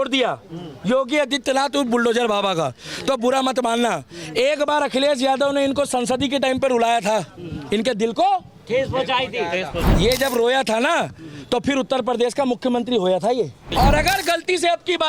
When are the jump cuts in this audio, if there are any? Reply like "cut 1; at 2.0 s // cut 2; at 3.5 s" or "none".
cut 1; at 13.7 s